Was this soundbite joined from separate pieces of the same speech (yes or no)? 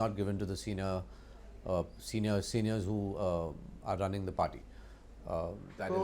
no